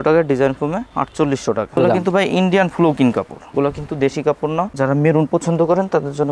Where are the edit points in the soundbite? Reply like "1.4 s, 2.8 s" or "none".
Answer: 1.8 s, 4.7 s